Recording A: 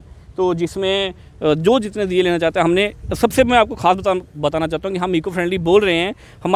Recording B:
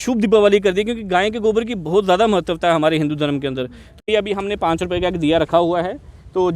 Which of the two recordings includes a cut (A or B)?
B